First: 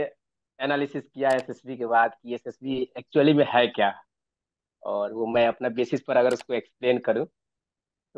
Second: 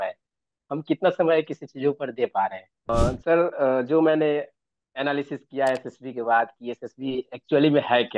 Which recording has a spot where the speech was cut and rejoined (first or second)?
second